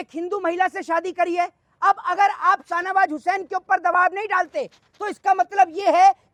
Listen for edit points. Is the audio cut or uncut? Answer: uncut